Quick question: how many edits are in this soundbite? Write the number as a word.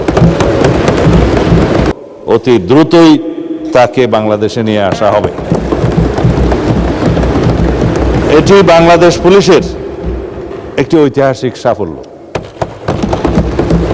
one